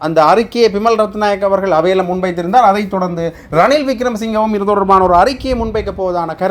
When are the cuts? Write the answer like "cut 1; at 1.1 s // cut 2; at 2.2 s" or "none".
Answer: none